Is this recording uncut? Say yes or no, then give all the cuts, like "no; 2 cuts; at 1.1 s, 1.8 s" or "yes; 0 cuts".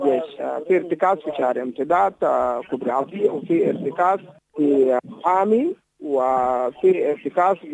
no; 2 cuts; at 4.4 s, 5.0 s